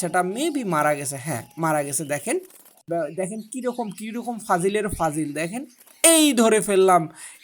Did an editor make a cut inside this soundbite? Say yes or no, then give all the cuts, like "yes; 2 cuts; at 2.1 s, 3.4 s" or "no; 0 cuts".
yes; 1 cut; at 2.9 s